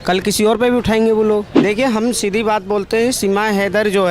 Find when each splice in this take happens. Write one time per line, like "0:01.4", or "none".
0:01.5

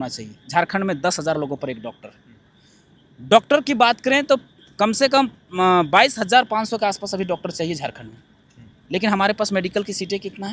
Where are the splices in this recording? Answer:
none

